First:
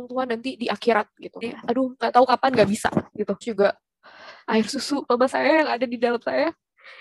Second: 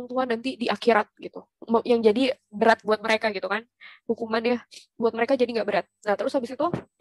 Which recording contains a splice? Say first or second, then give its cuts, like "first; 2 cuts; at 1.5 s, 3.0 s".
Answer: first; 2 cuts; at 1.5 s, 3.5 s